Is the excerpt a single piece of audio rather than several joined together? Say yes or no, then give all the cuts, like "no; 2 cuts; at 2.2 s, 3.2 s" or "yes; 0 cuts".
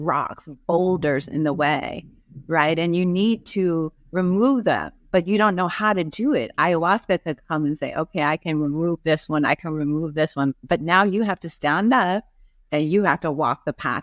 yes; 0 cuts